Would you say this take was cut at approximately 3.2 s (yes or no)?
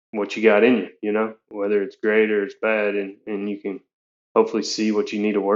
no